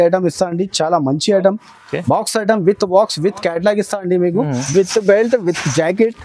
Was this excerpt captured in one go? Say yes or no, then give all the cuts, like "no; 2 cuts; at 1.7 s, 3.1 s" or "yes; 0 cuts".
no; 1 cut; at 4.6 s